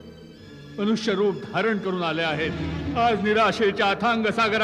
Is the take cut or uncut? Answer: cut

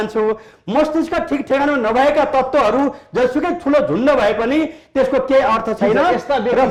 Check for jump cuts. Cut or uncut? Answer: uncut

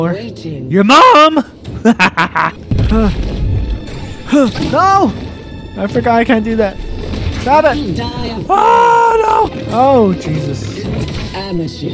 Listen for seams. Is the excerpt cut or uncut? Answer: cut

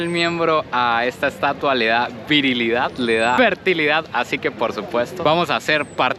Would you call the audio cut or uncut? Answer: uncut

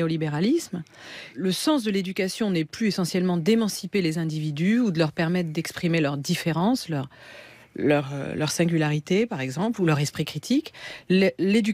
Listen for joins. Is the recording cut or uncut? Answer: cut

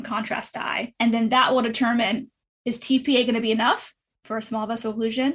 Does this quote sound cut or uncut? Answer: cut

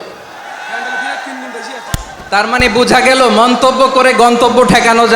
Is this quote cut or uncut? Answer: cut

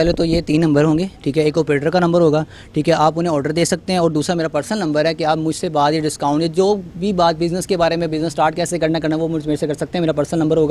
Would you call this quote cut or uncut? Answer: uncut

